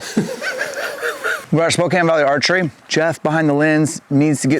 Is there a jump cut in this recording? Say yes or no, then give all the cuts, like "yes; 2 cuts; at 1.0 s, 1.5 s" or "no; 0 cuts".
yes; 1 cut; at 1.3 s